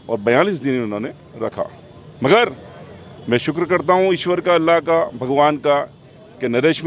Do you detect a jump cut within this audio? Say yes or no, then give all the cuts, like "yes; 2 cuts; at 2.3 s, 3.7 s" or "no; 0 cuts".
no; 0 cuts